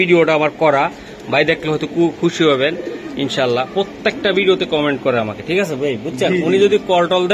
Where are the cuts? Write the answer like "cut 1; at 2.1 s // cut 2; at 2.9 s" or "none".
none